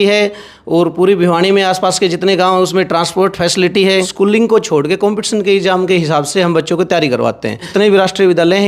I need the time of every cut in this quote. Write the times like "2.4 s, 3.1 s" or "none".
4.1 s, 7.7 s